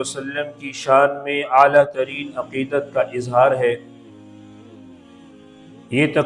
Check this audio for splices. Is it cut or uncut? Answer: uncut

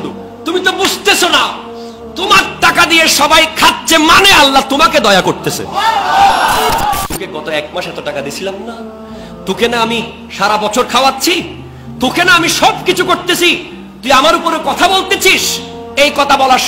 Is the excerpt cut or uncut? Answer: cut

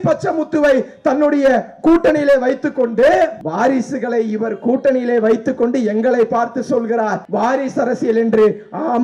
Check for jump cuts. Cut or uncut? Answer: cut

